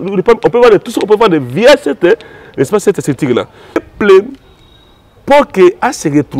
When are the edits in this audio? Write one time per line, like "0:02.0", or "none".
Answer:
0:03.8